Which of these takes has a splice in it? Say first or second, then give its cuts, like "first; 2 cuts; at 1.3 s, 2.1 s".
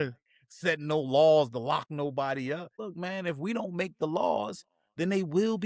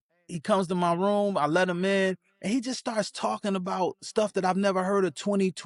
first; 1 cut; at 2.8 s